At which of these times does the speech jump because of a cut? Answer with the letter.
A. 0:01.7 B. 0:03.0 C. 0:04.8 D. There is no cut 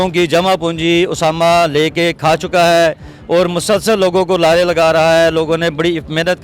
D